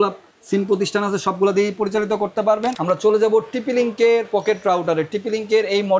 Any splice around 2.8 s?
yes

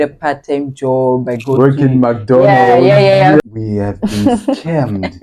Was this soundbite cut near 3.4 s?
yes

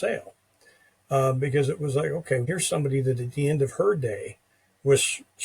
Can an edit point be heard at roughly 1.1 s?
no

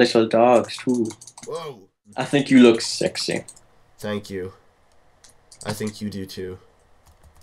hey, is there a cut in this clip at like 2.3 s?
yes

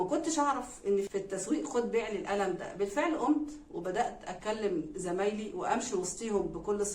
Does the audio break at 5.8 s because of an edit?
no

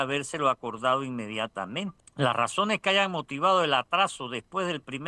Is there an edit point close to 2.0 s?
yes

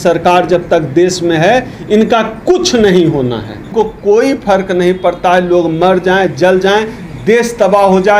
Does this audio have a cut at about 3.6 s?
yes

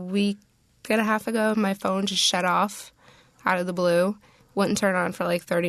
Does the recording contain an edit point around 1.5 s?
yes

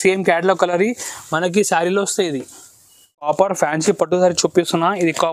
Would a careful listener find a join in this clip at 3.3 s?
yes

